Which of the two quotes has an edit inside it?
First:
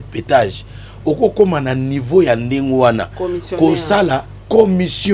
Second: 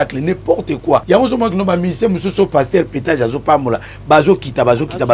second; 1 cut; at 1.0 s

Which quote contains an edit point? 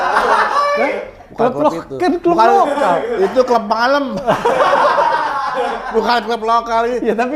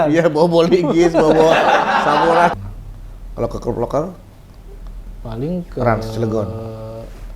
second; 1 cut; at 2.5 s

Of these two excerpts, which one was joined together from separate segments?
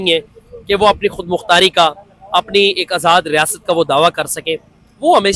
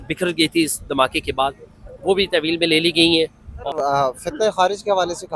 second; 1 cut; at 3.5 s

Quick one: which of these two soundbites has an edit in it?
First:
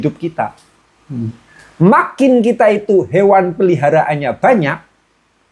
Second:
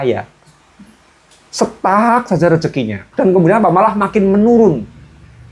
second; 1 cut; at 3.1 s

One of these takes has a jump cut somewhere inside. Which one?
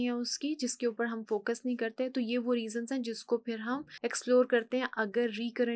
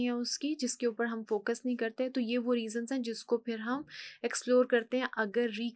first; 1 cut; at 3.9 s

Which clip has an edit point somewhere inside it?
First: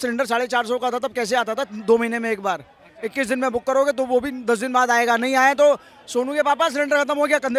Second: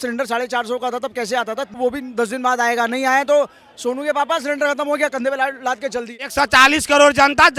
second; 2 cuts; at 1.8 s, 6.3 s

